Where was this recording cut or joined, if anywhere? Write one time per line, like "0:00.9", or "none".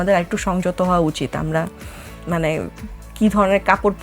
none